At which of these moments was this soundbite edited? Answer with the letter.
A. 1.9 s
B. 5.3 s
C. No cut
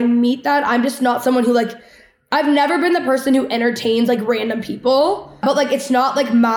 B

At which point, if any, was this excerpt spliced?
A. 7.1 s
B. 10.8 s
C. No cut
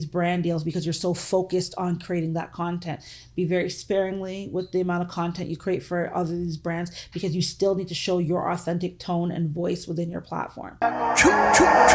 B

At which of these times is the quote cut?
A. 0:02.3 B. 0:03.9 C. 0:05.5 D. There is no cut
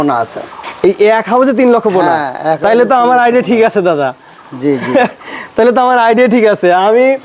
D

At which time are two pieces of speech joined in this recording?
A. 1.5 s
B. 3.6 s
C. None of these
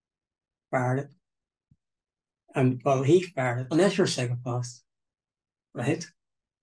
B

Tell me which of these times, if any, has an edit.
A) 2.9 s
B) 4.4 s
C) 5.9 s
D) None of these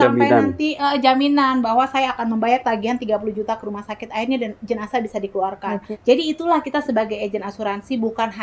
C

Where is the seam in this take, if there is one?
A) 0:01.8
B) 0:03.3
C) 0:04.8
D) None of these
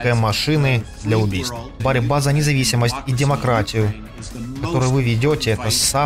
A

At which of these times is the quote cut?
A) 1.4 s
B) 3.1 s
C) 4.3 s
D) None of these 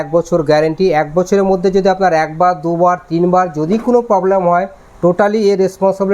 D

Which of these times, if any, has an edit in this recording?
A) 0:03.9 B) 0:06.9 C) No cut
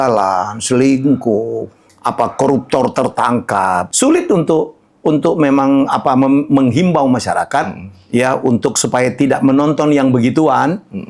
A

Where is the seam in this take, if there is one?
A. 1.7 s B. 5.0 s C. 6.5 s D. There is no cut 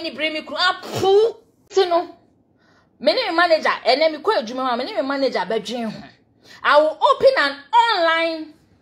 A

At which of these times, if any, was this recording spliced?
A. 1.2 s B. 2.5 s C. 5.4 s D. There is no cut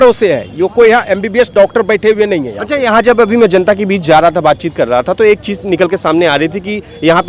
D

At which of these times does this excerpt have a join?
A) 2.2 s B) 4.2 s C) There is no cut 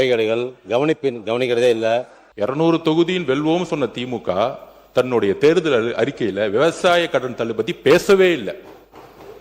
A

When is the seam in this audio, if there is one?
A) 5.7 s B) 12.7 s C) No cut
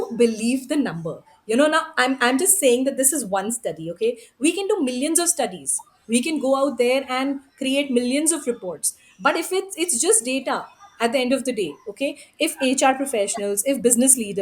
C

